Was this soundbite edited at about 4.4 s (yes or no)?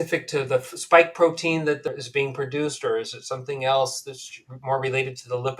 no